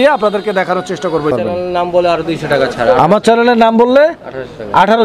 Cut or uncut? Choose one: cut